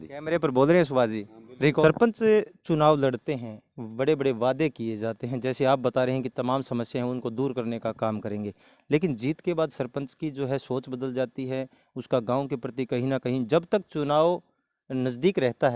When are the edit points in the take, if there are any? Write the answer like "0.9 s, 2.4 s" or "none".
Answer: 1.7 s